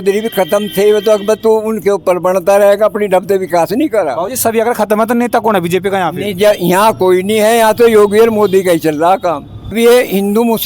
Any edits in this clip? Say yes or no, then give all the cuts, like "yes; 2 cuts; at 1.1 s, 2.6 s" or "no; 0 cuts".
yes; 1 cut; at 9.7 s